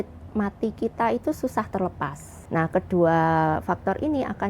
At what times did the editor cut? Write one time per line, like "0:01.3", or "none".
0:02.3

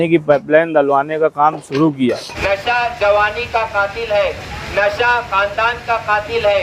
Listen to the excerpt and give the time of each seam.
0:02.3

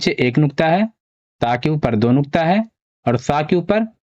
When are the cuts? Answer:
none

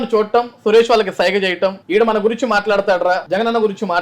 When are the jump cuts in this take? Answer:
0:01.8
0:03.2

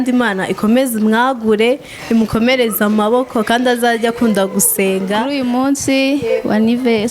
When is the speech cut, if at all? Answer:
0:05.3

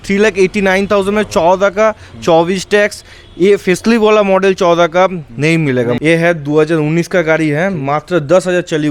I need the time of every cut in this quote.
0:06.0

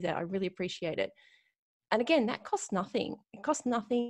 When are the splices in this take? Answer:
none

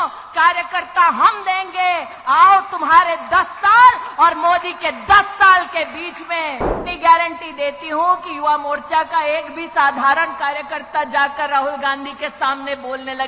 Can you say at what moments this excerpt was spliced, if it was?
0:06.8

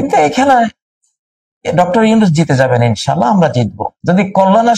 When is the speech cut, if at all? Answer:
0:03.9

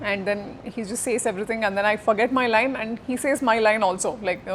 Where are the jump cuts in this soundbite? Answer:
none

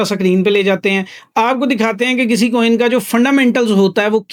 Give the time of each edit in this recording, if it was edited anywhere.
none

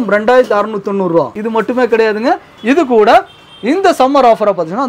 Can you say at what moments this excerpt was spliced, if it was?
0:01.4

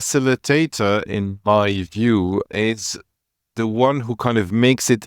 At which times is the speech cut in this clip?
none

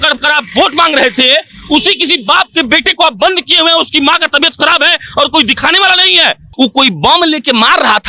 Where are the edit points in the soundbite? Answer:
0:06.5

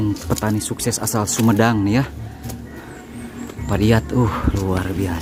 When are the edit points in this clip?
none

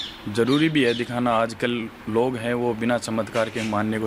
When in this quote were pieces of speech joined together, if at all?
none

